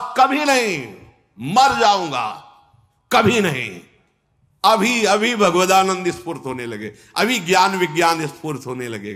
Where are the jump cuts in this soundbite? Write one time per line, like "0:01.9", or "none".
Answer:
none